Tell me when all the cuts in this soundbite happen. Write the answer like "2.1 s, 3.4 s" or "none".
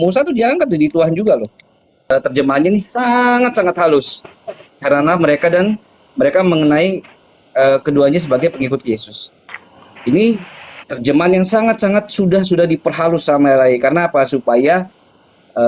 1.9 s